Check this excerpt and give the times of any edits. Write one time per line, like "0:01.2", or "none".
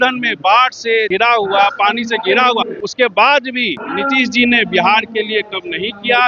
0:01.1
0:02.8
0:03.8